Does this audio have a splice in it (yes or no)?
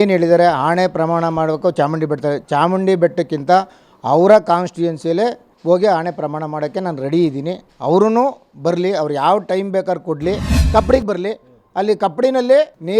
yes